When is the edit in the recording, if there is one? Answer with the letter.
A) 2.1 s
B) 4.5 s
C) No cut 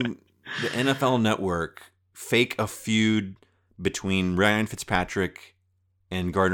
A